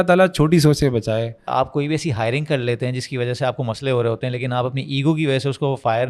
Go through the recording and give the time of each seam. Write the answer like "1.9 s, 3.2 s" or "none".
1.5 s